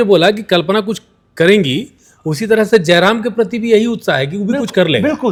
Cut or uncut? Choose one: uncut